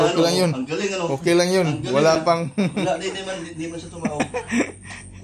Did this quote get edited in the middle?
no; 0 cuts

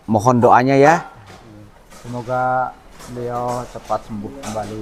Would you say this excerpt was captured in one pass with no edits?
yes; 0 cuts

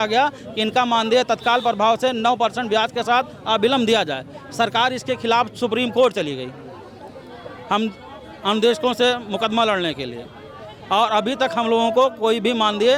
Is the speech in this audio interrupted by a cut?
no; 0 cuts

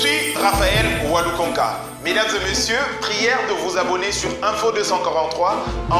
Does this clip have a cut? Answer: no; 0 cuts

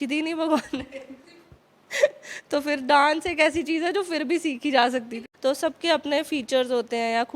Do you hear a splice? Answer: yes; 1 cut; at 5.2 s

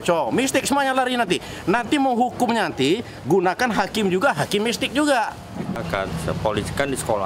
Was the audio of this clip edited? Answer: yes; 1 cut; at 5.8 s

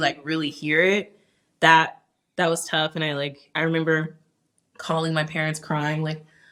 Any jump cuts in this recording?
no; 0 cuts

